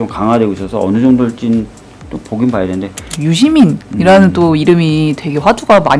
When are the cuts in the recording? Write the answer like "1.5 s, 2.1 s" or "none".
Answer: 3.1 s